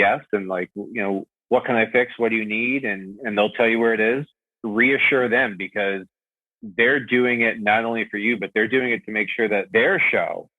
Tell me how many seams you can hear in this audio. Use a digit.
3